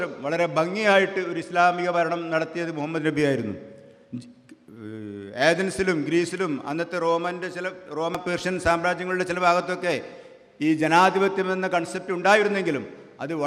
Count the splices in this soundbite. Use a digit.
1